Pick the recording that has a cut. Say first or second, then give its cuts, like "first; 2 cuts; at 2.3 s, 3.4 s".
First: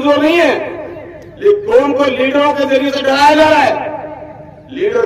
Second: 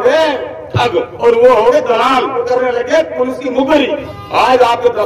second; 3 cuts; at 1.1 s, 2.4 s, 4.1 s